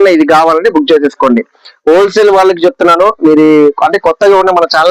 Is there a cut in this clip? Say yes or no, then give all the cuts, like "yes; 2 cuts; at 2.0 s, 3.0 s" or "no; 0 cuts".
no; 0 cuts